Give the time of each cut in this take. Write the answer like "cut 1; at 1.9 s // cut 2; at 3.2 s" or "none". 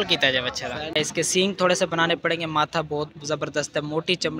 cut 1; at 0.9 s